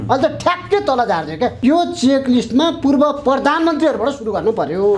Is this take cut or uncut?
cut